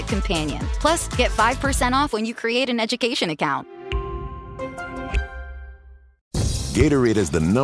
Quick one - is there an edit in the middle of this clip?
yes; 1 cut; at 6.4 s

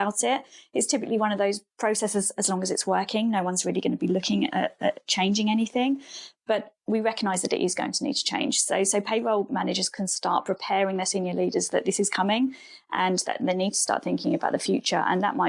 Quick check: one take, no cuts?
no; 1 cut; at 1.7 s

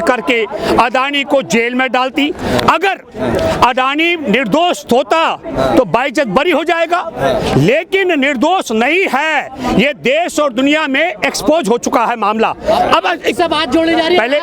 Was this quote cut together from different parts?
no; 0 cuts

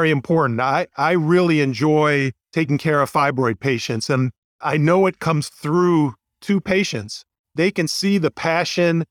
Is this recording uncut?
yes; 0 cuts

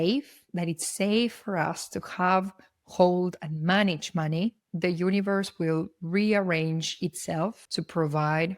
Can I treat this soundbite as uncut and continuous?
no; 1 cut; at 7.6 s

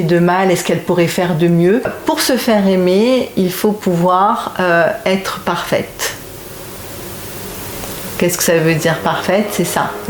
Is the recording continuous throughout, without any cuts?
no; 1 cut; at 2.0 s

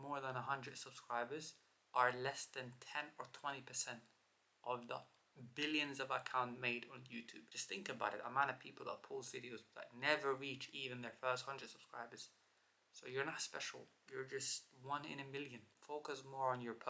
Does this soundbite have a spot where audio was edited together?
yes; 1 cut; at 15.7 s

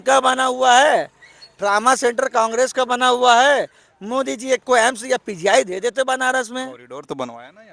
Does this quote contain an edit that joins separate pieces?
no; 0 cuts

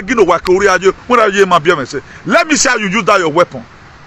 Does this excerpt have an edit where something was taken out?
no; 0 cuts

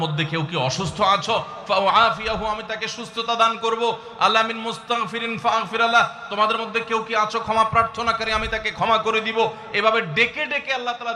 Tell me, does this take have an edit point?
no; 0 cuts

